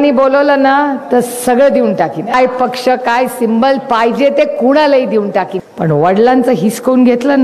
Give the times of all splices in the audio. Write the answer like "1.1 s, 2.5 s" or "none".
2.3 s, 5.6 s